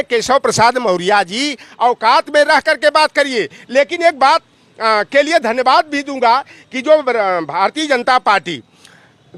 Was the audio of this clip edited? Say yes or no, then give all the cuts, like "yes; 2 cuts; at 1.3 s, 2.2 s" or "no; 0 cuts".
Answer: no; 0 cuts